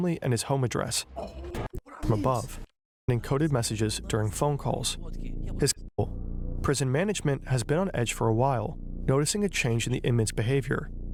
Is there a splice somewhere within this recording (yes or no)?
no